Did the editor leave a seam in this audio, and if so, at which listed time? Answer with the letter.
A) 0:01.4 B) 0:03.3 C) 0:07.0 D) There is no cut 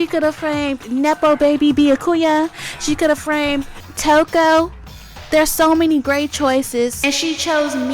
C